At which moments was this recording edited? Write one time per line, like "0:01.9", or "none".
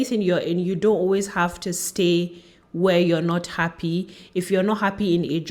none